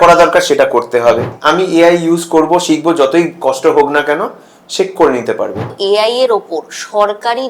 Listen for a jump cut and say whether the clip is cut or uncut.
cut